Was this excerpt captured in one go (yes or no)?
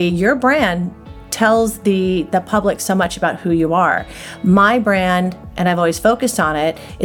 yes